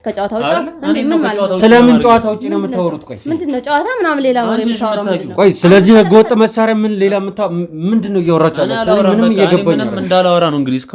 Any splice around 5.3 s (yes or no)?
no